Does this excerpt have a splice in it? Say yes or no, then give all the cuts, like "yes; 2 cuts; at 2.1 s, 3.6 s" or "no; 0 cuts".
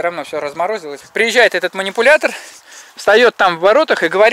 yes; 1 cut; at 1.0 s